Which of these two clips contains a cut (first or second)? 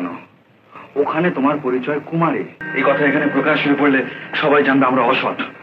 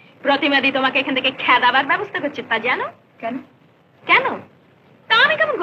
first